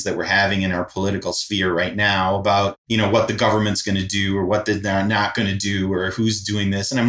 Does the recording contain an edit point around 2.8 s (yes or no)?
yes